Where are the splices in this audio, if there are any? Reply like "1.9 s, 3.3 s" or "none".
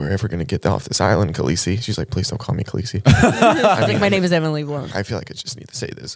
4.9 s